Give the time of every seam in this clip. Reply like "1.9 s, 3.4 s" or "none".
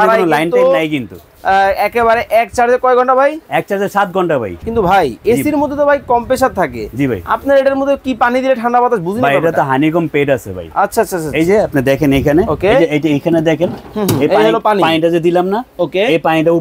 4.6 s